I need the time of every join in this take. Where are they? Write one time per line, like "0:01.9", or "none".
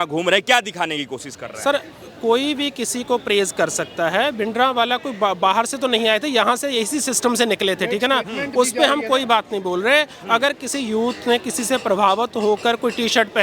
none